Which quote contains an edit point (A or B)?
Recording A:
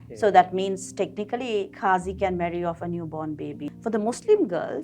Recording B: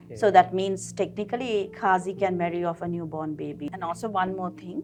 A